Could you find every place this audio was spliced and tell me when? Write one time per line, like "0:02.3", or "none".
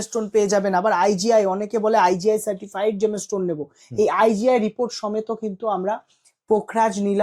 none